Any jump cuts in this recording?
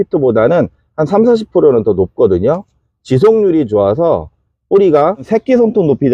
yes; 1 cut; at 5.2 s

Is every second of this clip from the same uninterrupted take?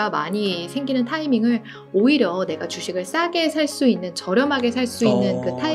yes; 0 cuts

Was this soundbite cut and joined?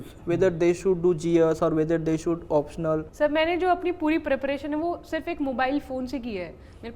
yes; 1 cut; at 3.1 s

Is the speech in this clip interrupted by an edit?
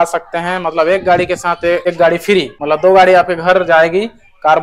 yes; 2 cuts; at 1.8 s, 2.5 s

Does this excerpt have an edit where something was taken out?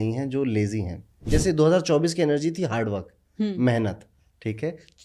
yes; 1 cut; at 1.1 s

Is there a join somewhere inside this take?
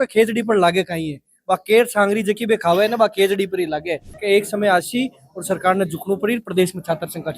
yes; 1 cut; at 4.1 s

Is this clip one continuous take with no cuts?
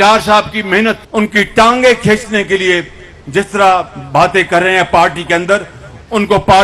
no; 1 cut; at 1.0 s

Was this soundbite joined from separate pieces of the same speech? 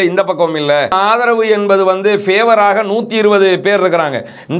yes; 1 cut; at 0.9 s

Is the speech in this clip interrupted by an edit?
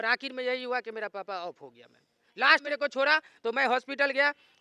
no; 0 cuts

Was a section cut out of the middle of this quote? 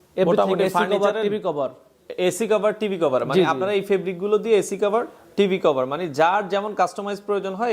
no; 0 cuts

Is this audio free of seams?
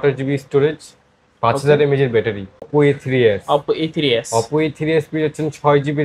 no; 1 cut; at 2.7 s

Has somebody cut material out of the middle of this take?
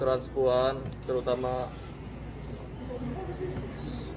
no; 0 cuts

